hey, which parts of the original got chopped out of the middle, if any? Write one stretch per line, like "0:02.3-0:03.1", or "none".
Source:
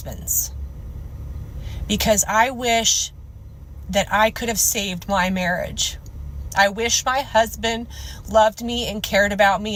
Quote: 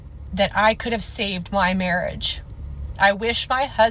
none